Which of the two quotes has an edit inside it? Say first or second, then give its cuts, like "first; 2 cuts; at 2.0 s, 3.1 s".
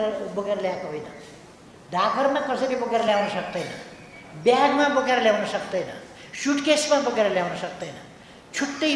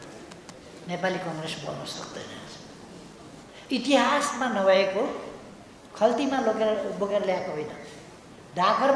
second; 1 cut; at 3.2 s